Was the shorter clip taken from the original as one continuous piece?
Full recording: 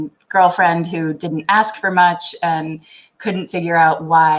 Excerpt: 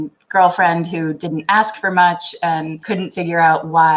no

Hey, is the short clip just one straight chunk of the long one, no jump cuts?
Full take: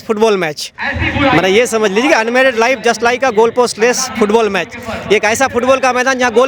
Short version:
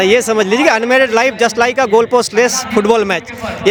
yes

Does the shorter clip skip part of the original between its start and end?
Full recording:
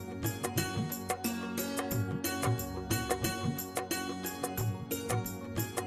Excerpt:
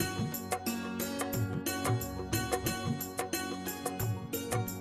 no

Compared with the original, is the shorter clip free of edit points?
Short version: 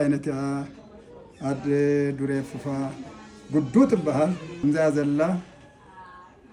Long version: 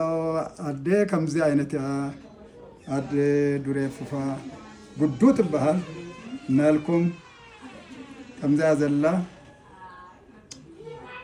no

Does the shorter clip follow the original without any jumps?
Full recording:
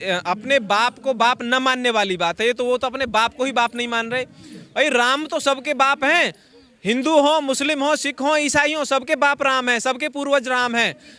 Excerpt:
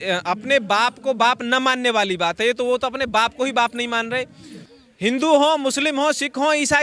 no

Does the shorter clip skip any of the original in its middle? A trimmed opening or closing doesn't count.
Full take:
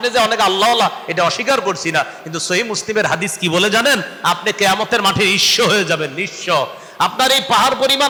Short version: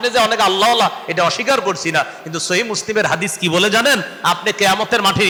no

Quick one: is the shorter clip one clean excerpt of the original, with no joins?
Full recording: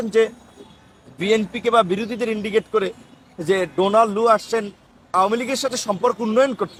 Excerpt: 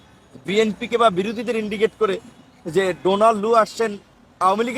yes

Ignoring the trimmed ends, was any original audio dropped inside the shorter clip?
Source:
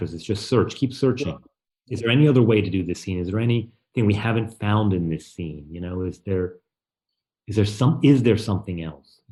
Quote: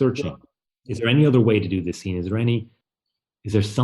yes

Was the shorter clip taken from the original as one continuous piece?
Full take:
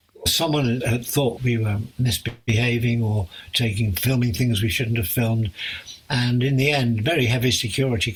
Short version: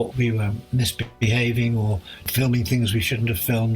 no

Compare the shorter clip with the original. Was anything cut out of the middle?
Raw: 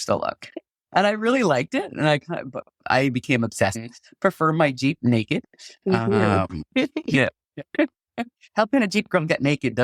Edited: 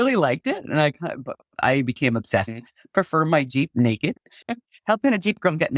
yes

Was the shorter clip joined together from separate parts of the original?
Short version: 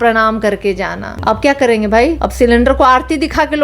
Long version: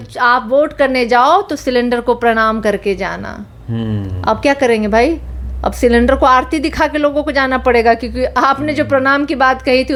yes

